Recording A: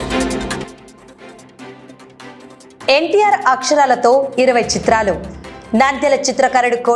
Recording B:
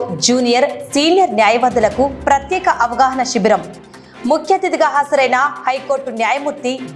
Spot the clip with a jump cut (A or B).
A